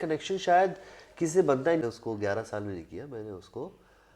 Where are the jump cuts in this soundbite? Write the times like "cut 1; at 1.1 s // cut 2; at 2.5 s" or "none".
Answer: cut 1; at 1.8 s